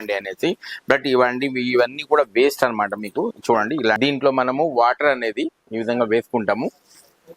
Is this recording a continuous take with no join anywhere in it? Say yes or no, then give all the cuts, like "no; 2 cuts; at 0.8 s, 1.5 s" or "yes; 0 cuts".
no; 1 cut; at 4.0 s